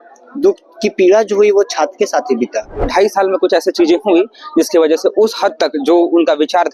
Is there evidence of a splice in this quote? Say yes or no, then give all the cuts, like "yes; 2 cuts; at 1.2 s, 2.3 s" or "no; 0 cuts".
yes; 1 cut; at 2.9 s